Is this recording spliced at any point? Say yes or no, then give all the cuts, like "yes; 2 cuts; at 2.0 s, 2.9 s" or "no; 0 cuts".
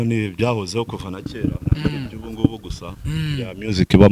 no; 0 cuts